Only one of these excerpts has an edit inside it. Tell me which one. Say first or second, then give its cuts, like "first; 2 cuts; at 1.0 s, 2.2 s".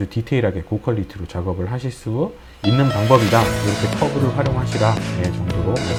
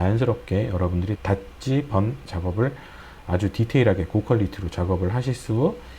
second; 2 cuts; at 1.2 s, 2.3 s